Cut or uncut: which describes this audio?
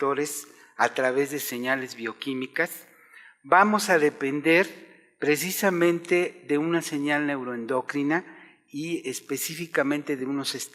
cut